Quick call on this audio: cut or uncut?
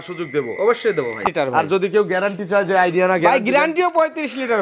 cut